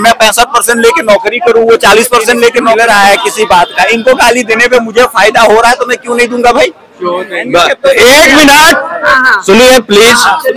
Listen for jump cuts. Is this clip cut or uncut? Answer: cut